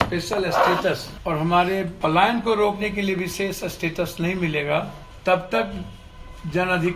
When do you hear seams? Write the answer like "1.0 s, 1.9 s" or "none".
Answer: 1.1 s, 1.9 s, 5.0 s